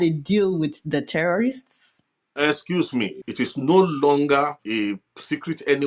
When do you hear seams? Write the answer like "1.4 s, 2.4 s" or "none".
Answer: 3.2 s, 4.6 s